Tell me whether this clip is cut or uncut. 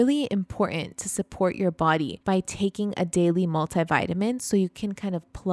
cut